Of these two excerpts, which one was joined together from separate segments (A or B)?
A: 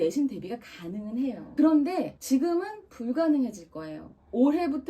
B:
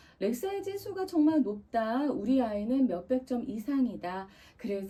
A